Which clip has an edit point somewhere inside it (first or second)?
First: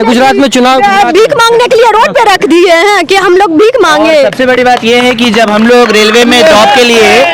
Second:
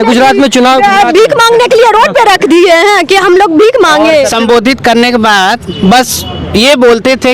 second